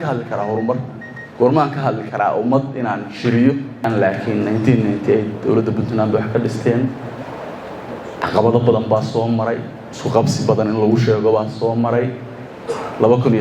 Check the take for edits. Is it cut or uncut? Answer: cut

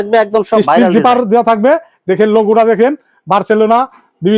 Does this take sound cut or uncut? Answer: uncut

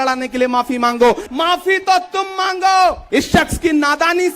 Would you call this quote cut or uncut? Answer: cut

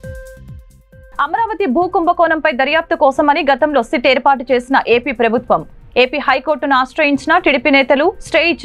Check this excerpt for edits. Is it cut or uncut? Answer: cut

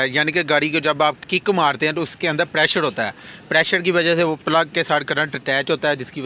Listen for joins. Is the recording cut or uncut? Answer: cut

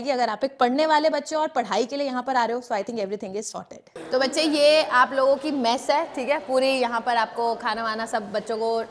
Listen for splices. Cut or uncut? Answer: uncut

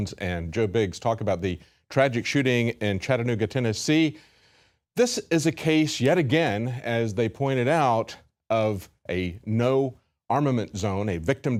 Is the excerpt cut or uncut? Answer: uncut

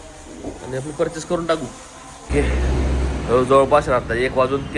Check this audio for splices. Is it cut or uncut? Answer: cut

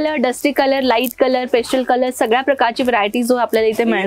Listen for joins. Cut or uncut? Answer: uncut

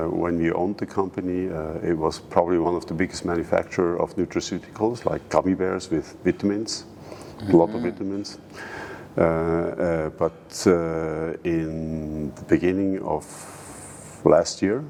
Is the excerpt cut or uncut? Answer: uncut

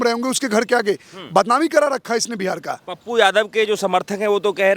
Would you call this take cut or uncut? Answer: uncut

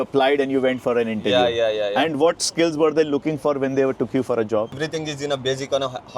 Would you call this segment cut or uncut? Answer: cut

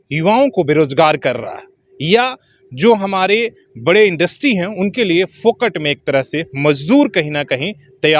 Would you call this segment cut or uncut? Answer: uncut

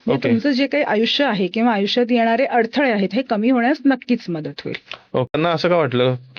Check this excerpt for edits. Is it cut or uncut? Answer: cut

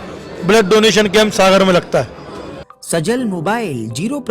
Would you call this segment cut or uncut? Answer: cut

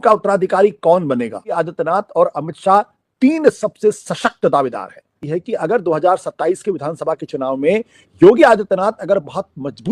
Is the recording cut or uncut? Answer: cut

